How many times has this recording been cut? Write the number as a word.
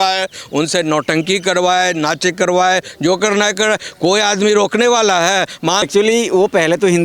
one